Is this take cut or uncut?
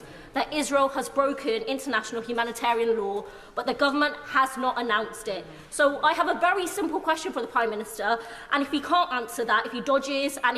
uncut